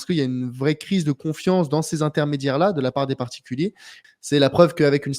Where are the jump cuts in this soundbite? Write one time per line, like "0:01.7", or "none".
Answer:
0:03.9

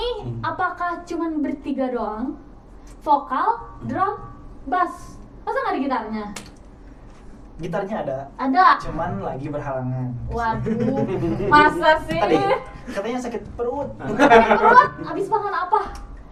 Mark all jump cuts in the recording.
none

